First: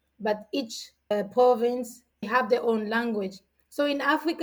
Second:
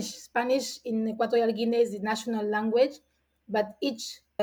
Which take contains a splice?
first; 1 cut; at 2.3 s

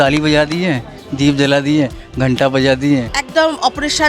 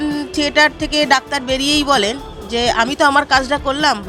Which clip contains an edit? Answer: first; 1 cut; at 3.2 s

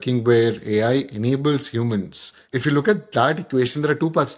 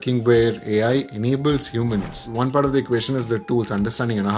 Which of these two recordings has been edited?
second; 1 cut; at 2.2 s

